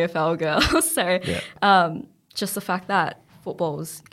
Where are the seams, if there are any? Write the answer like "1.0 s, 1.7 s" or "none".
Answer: none